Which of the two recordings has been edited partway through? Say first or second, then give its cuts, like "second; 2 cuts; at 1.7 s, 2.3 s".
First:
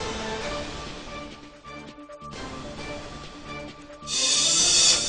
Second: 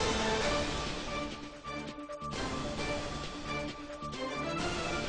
second; 1 cut; at 3.6 s